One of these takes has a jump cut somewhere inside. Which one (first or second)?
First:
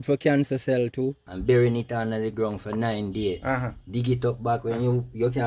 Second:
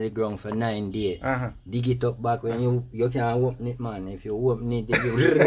first